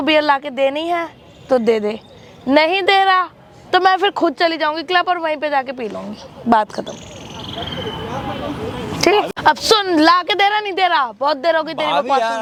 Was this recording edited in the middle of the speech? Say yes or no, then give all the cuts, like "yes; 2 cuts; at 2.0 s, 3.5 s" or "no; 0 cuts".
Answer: no; 0 cuts